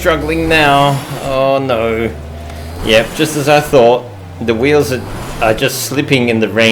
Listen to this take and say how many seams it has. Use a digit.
0